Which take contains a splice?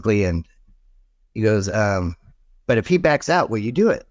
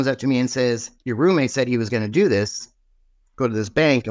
second; 1 cut; at 1.0 s

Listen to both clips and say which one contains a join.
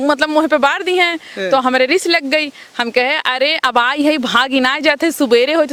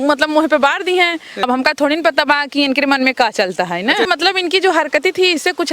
second; 2 cuts; at 1.3 s, 4.1 s

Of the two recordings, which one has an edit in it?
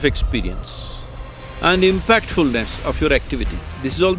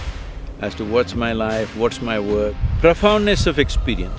second; 1 cut; at 2.6 s

